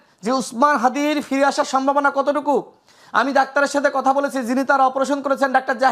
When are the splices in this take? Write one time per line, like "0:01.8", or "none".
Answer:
none